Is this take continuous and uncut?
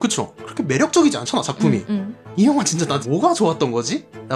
no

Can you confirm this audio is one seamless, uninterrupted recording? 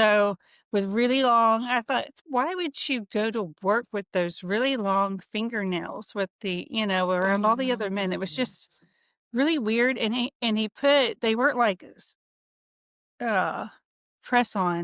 no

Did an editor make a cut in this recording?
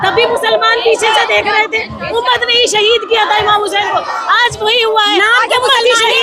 no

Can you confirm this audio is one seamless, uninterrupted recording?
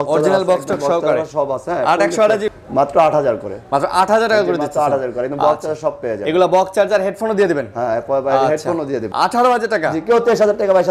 no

